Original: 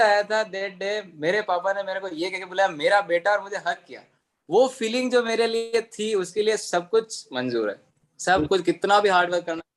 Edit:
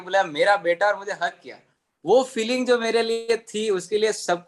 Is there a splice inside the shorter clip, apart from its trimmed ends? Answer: no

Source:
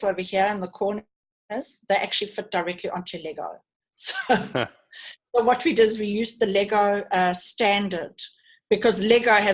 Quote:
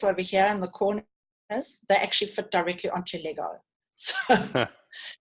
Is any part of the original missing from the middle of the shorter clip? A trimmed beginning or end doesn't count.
no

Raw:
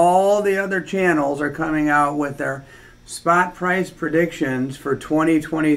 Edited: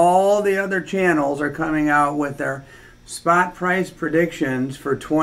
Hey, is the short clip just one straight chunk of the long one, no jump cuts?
yes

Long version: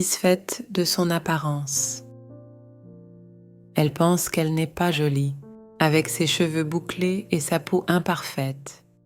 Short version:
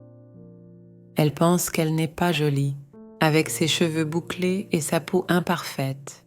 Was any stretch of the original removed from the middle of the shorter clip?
yes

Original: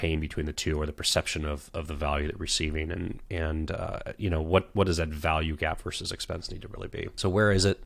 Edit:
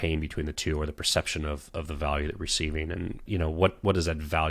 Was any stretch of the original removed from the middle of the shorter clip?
yes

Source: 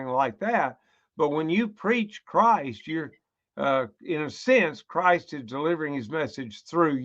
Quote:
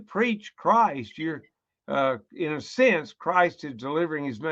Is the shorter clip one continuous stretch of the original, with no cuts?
yes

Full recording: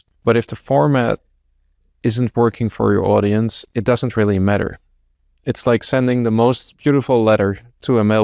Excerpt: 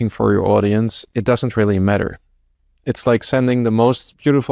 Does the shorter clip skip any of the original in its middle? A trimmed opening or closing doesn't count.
no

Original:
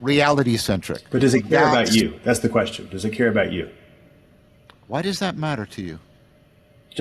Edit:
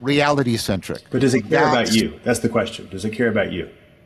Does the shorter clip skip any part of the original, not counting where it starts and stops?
no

